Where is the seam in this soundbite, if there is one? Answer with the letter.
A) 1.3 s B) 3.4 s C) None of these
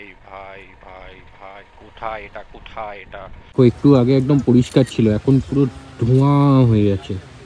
B